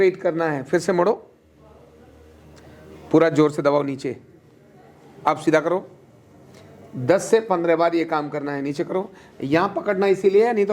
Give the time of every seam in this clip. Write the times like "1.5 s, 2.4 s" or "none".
none